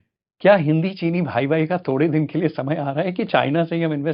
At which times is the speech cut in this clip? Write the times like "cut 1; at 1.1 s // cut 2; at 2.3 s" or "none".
none